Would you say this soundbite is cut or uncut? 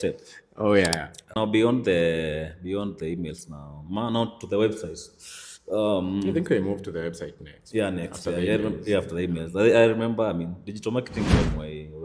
cut